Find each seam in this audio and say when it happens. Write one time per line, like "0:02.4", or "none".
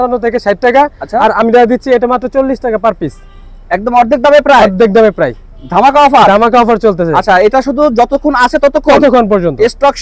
none

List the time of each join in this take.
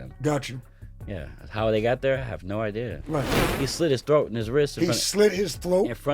0:03.4

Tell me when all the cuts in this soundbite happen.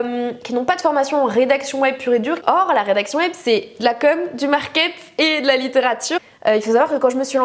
0:02.4
0:06.1

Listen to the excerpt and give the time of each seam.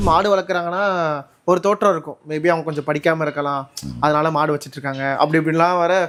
none

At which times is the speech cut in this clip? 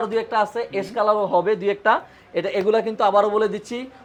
none

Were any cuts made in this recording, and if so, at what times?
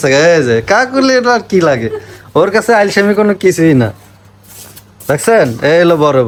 none

